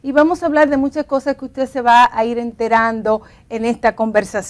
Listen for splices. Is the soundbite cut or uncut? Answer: cut